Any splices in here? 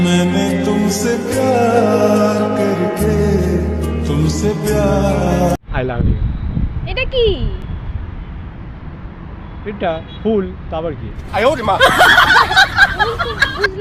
no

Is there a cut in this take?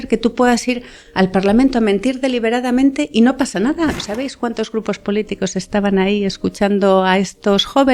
yes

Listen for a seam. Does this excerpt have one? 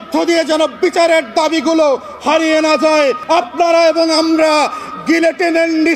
yes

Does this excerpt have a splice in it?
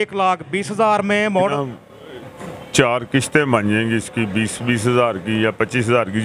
yes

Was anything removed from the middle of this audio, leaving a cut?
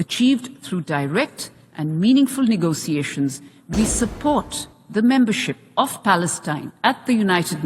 yes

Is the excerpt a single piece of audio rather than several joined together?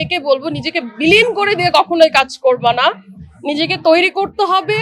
yes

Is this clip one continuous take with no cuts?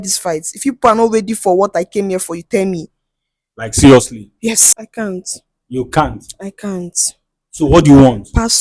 no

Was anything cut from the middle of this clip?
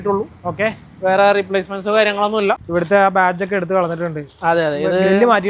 yes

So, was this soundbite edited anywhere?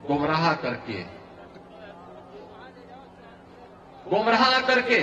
no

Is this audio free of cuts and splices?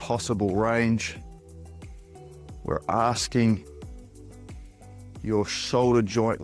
no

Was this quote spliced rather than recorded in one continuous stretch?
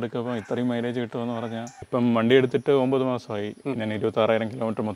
yes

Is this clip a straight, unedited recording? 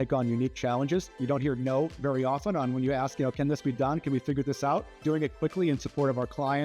no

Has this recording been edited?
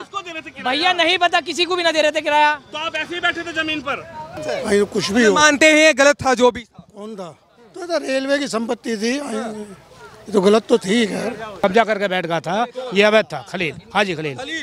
yes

